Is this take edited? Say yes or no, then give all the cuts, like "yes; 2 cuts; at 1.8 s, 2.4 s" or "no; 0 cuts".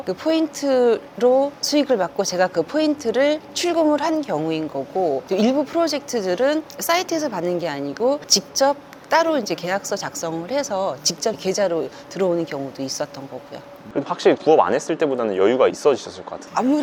no; 0 cuts